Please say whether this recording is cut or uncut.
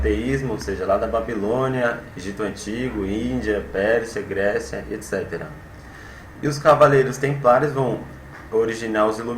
uncut